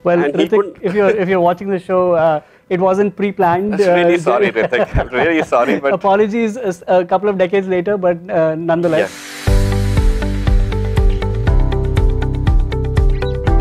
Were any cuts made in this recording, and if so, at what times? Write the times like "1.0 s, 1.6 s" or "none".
9.3 s